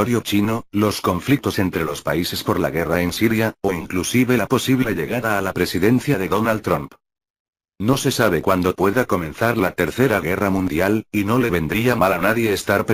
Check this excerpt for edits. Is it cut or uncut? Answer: uncut